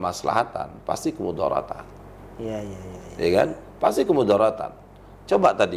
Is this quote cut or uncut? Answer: uncut